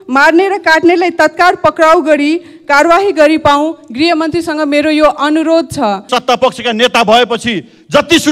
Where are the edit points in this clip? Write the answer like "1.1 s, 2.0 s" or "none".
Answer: 6.1 s